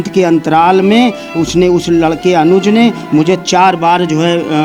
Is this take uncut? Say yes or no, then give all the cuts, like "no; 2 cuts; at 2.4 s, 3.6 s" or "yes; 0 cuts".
yes; 0 cuts